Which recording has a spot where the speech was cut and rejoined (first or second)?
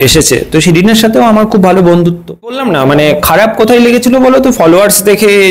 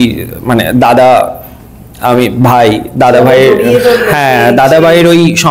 first